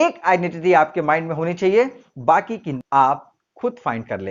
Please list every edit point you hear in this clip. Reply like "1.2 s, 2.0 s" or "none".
2.7 s